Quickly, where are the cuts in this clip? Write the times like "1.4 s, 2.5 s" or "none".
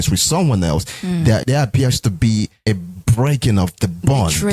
1.4 s